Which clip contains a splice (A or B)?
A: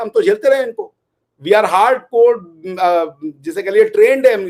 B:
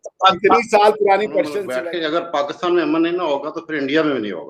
B